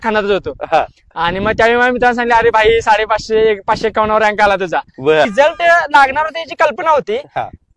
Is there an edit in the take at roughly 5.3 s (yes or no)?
yes